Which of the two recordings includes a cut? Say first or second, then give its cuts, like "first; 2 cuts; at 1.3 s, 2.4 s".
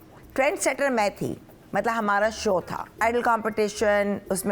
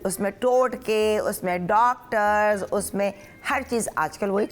first; 1 cut; at 3.0 s